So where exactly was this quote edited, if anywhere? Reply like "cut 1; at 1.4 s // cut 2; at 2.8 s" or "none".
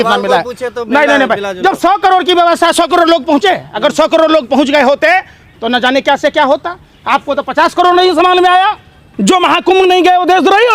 cut 1; at 9.1 s